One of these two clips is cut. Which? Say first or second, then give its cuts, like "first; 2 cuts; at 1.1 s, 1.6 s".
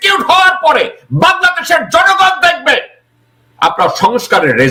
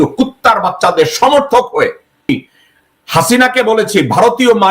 second; 1 cut; at 2.3 s